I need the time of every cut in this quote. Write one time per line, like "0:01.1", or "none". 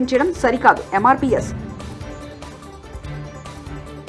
none